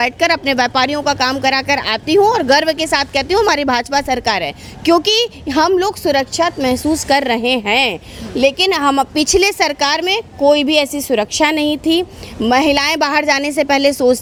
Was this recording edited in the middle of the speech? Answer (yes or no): no